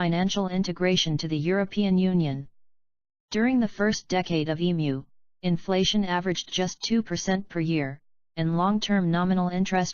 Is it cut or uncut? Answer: uncut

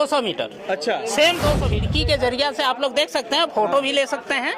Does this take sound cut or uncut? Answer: cut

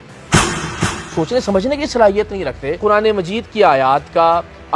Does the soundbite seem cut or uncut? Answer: cut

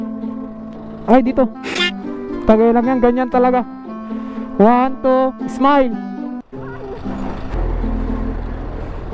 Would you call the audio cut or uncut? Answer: uncut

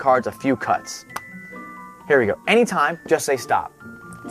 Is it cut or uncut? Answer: uncut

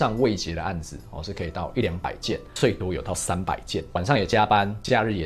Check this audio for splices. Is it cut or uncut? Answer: cut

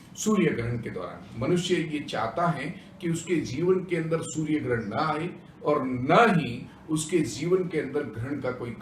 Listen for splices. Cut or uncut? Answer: uncut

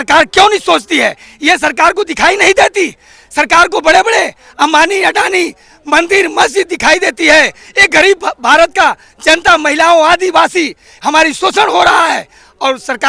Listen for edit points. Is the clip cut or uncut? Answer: uncut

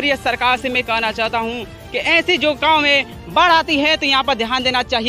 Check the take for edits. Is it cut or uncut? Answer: uncut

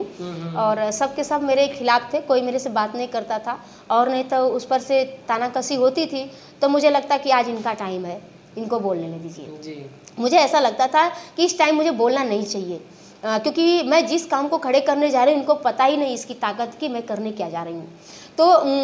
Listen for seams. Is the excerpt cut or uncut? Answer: uncut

